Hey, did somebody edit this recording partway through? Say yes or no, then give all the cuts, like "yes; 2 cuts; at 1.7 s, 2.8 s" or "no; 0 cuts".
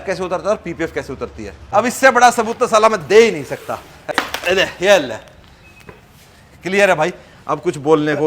yes; 2 cuts; at 1.6 s, 4.1 s